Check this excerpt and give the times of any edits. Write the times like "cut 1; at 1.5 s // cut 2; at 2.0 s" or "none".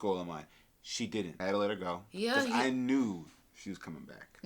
cut 1; at 1.4 s